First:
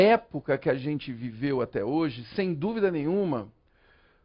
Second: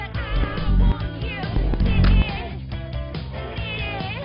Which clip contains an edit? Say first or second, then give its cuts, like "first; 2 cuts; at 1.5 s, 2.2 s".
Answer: second; 1 cut; at 1.3 s